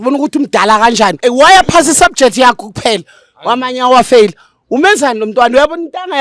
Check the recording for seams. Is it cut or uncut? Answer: cut